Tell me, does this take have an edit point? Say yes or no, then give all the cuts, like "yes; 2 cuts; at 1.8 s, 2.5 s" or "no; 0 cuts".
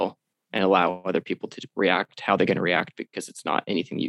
no; 0 cuts